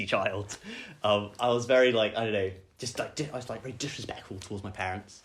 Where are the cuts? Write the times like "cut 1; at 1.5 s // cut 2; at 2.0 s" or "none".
none